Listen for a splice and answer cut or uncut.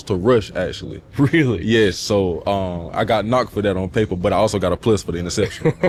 uncut